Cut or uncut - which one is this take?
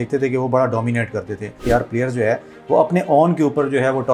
cut